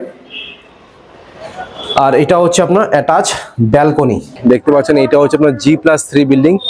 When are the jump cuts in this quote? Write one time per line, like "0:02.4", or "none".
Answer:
0:04.4